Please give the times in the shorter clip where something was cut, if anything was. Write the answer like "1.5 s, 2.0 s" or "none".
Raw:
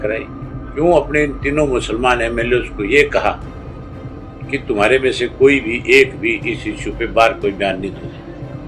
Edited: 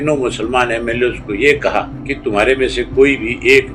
2.0 s

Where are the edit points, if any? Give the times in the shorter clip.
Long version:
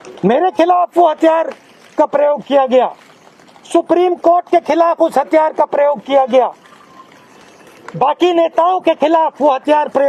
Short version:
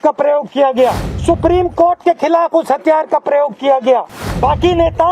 1.1 s, 4.2 s

